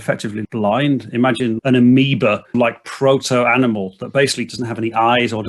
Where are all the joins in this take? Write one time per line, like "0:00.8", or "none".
0:01.6
0:02.5
0:04.5